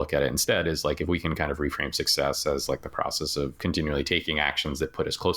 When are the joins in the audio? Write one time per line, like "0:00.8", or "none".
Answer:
0:03.6